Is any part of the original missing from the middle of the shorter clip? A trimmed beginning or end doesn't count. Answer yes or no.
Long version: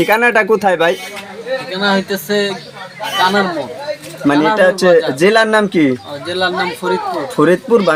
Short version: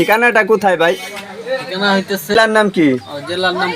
yes